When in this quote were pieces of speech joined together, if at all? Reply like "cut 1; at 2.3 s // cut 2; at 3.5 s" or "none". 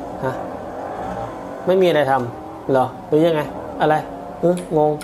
none